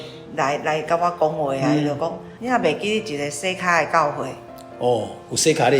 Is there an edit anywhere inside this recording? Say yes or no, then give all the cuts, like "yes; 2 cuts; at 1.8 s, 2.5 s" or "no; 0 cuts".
yes; 1 cut; at 2.3 s